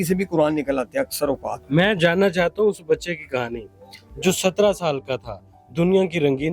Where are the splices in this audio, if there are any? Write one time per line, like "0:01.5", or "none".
0:01.5